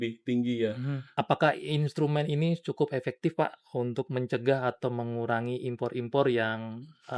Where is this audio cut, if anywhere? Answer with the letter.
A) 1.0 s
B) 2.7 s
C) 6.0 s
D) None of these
A